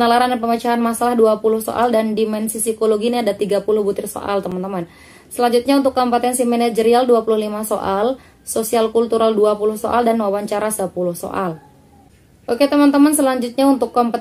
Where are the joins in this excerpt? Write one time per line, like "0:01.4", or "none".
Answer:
none